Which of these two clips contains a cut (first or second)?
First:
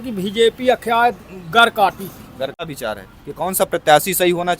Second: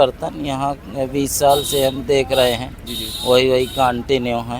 first